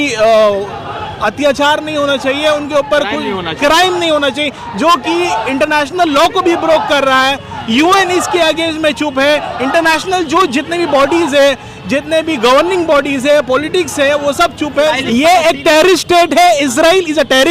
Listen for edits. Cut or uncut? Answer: cut